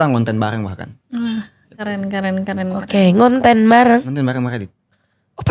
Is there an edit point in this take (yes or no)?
no